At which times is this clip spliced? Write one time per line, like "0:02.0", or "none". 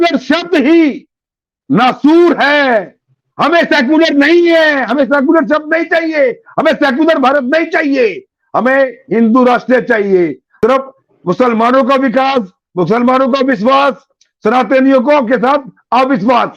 0:10.4